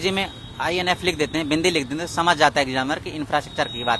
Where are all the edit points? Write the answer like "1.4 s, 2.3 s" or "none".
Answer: none